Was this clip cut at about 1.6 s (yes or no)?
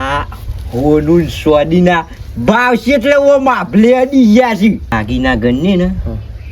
no